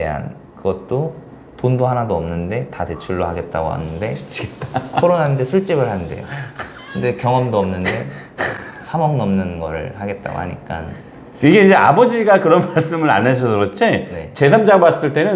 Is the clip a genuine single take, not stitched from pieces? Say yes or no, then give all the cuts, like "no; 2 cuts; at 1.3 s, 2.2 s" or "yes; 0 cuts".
yes; 0 cuts